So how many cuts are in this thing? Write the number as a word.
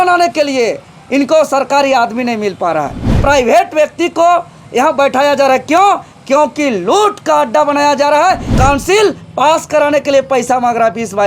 two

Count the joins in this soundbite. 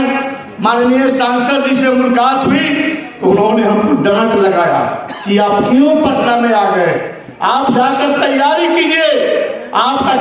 zero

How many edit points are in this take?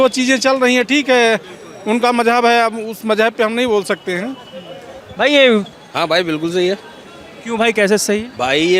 one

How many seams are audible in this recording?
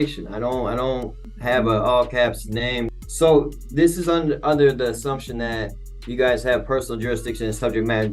two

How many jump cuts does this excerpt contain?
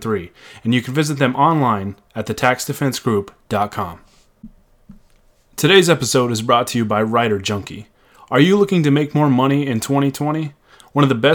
one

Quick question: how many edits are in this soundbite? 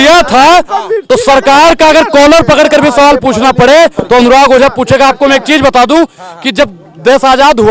zero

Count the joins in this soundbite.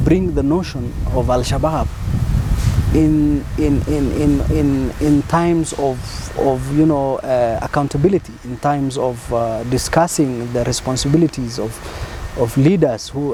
zero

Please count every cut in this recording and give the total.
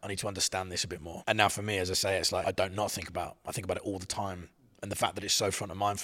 two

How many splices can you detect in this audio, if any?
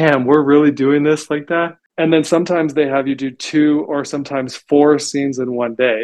one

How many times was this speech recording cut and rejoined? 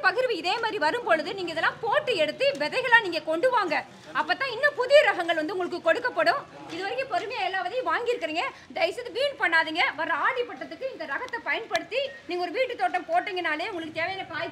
zero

